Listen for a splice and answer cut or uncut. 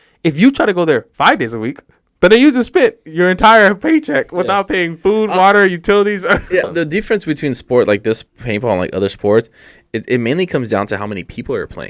cut